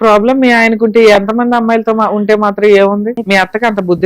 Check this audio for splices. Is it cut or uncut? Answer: cut